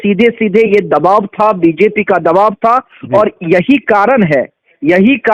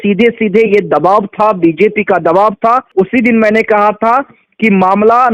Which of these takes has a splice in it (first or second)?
second